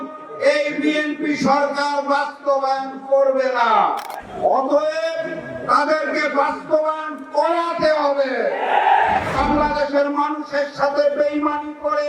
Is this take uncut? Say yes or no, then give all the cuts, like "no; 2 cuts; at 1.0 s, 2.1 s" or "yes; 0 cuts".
no; 2 cuts; at 4.2 s, 9.3 s